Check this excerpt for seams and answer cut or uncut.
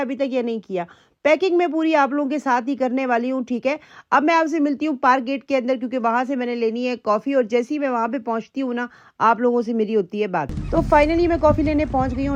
uncut